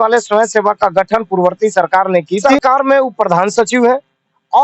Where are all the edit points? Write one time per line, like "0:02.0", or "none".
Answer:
0:02.5